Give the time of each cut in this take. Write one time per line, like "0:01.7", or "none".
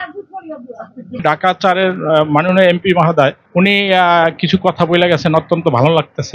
0:01.2